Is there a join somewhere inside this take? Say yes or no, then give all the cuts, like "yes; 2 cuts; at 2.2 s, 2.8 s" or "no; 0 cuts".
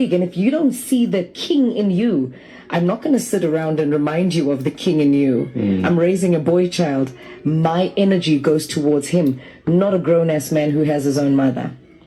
yes; 1 cut; at 6.0 s